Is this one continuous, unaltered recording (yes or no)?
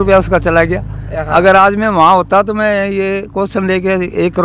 yes